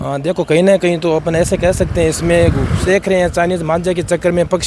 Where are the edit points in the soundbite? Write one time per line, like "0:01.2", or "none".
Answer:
0:02.8